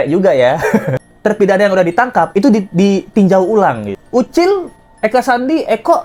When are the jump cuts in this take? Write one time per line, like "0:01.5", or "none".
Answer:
0:01.0
0:03.9